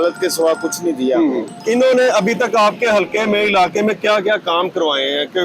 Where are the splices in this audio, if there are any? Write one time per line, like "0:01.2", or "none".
none